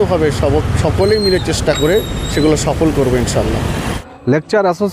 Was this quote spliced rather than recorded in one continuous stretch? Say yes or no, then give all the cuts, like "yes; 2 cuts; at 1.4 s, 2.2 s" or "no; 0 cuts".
no; 0 cuts